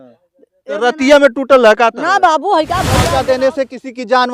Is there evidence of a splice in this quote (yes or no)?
yes